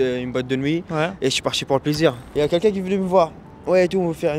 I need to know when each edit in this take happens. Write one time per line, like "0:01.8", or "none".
0:02.2